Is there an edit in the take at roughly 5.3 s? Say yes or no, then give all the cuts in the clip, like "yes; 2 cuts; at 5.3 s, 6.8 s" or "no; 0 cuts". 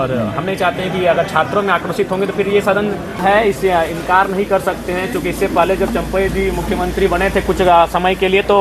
no; 1 cut; at 3.2 s